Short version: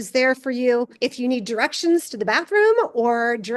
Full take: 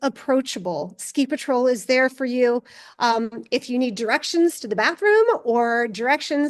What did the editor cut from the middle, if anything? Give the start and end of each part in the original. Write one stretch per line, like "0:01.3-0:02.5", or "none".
0:02.7-0:03.4